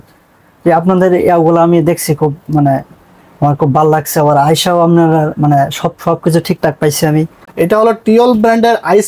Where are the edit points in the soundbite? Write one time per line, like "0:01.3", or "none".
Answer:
0:07.4